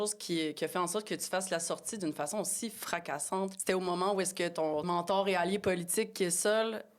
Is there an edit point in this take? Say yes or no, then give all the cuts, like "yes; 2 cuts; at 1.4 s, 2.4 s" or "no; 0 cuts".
yes; 2 cuts; at 3.6 s, 4.8 s